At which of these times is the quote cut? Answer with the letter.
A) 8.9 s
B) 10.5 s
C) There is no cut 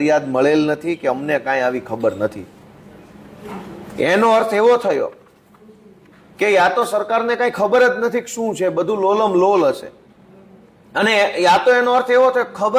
C